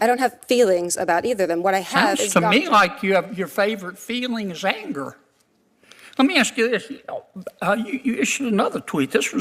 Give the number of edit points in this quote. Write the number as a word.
zero